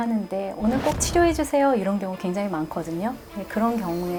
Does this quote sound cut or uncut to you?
uncut